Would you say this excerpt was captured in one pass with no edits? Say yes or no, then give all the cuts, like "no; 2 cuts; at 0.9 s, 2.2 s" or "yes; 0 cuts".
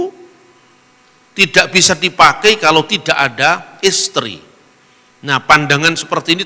yes; 0 cuts